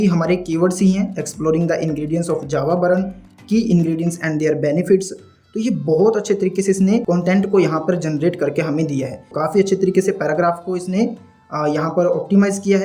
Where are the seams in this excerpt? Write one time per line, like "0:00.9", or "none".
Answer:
0:09.3